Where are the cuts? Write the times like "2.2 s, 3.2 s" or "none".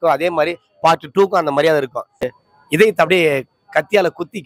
2.3 s